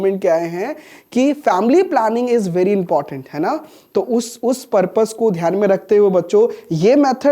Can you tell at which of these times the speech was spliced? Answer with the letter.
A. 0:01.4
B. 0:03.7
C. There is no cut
C